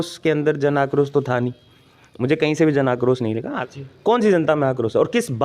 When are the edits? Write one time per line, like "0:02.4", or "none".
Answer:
0:03.5